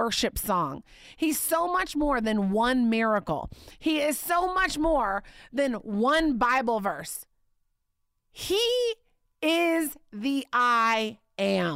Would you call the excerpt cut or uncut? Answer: uncut